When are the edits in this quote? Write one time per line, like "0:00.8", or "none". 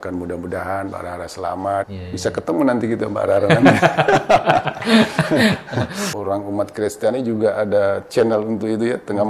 0:02.0
0:06.1